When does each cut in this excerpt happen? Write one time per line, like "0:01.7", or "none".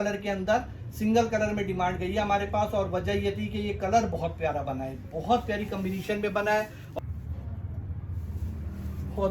0:06.8